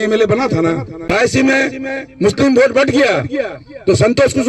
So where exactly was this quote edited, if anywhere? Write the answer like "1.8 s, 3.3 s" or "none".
0.9 s